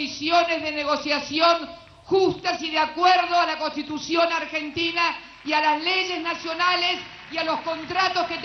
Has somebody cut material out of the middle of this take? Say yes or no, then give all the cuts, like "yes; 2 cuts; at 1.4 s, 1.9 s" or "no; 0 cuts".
no; 0 cuts